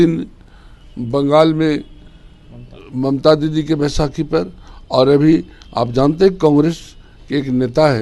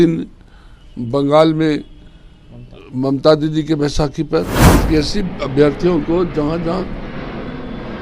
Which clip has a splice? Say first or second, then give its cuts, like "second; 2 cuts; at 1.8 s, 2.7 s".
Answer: second; 1 cut; at 4.7 s